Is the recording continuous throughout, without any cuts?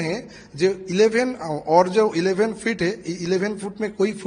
yes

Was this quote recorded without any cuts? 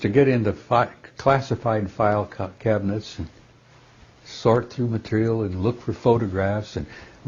yes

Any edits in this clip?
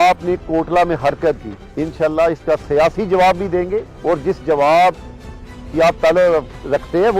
no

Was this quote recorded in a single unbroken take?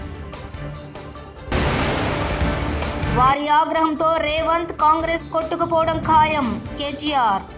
no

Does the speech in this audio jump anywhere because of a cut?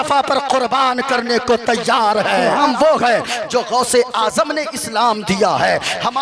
yes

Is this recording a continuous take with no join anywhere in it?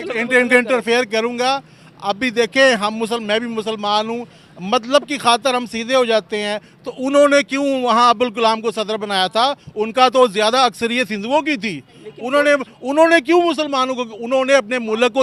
yes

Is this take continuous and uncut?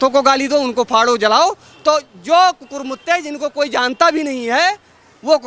yes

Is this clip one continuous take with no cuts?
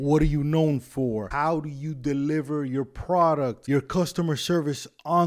no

